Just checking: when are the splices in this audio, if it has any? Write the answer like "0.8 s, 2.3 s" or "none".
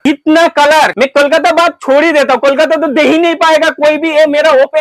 0.9 s